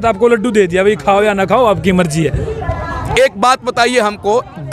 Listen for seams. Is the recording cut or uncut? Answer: uncut